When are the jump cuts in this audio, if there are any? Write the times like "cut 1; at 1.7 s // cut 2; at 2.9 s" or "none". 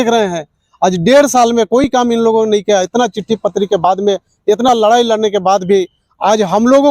none